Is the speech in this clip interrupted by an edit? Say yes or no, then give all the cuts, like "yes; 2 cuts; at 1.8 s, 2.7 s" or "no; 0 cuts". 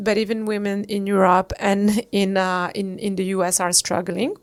no; 0 cuts